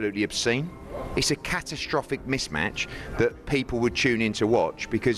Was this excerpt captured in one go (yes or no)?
yes